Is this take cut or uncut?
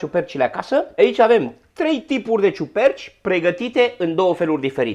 cut